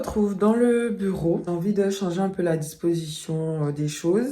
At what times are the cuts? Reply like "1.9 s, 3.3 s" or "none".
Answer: 1.4 s